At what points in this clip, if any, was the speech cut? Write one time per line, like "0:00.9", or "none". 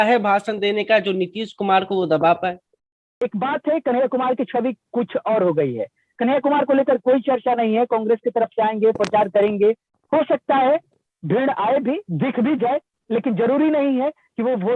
0:03.2